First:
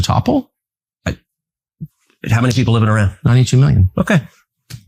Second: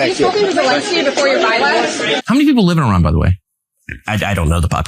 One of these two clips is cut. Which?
second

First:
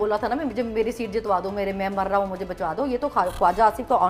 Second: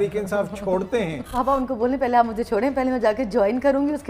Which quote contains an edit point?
second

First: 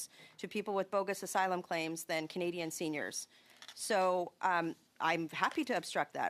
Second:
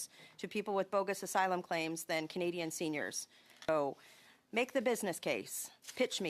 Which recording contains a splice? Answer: second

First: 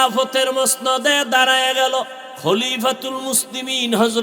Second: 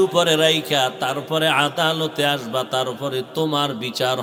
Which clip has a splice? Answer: first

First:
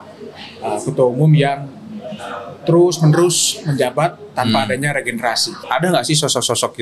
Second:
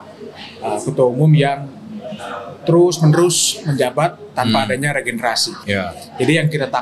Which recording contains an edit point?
first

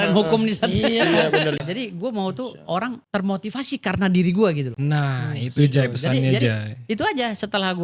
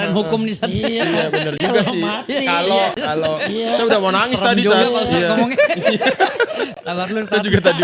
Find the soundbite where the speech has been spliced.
first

